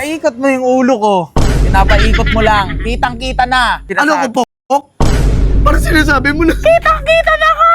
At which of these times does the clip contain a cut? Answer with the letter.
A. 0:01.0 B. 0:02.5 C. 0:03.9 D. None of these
C